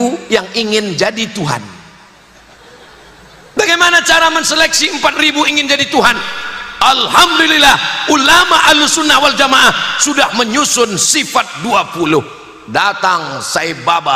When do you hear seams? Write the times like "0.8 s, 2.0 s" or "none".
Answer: none